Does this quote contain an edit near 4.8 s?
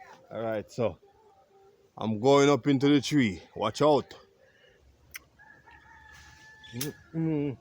yes; 1 cut; at 4.8 s

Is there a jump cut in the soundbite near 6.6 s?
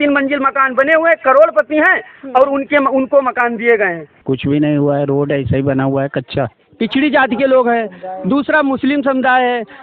yes; 2 cuts; at 4.1 s, 6.6 s

